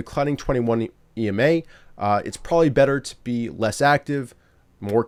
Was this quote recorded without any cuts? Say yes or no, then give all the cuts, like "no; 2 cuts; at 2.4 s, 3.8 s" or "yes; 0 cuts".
yes; 0 cuts